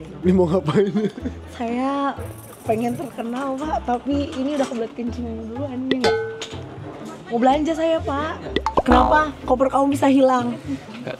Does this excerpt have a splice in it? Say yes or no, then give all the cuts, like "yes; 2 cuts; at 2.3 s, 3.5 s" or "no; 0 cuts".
yes; 1 cut; at 8.6 s